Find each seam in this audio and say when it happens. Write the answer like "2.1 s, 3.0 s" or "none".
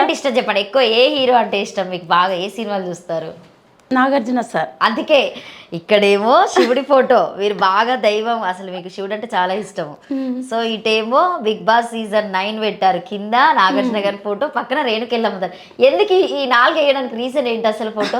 none